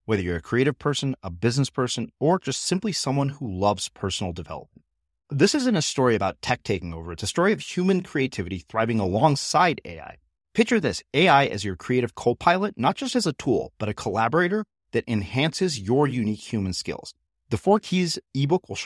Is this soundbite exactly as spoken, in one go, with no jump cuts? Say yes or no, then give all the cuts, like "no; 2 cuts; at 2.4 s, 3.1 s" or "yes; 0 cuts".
yes; 0 cuts